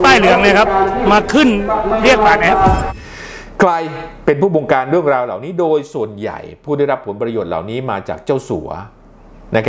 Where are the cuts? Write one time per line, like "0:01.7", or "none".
0:02.9